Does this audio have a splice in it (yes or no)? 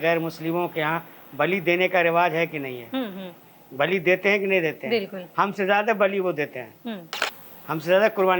no